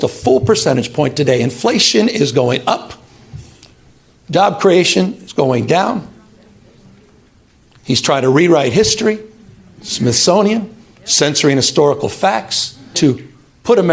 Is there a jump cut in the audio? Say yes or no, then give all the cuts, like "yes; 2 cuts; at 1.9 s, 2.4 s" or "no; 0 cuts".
yes; 1 cut; at 13.0 s